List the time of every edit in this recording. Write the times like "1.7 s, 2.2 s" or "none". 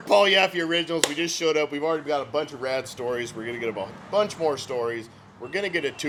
none